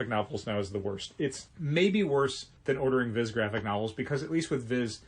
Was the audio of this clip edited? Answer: yes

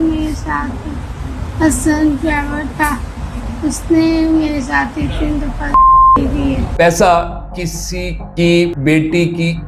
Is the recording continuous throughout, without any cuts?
no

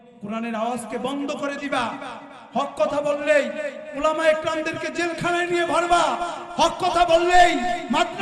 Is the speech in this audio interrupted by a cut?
no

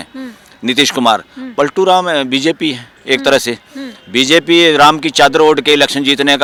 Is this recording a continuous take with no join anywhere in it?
yes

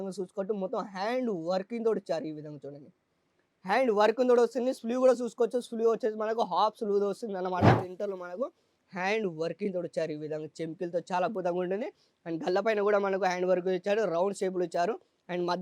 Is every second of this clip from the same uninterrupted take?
no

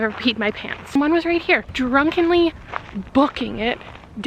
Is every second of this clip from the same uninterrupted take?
no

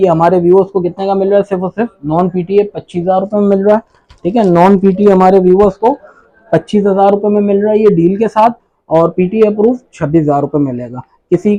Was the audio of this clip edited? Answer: no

